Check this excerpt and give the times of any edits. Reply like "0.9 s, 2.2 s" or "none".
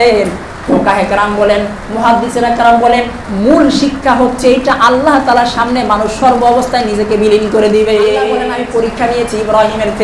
8.4 s